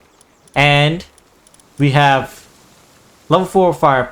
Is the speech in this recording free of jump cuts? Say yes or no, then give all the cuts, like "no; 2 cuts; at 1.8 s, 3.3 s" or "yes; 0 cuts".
yes; 0 cuts